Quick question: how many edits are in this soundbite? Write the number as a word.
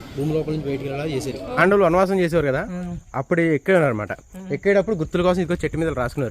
one